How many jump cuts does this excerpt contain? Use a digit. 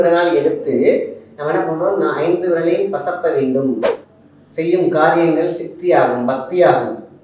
1